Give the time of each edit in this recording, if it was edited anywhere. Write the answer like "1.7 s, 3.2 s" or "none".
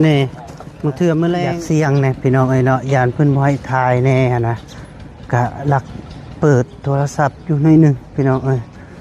1.6 s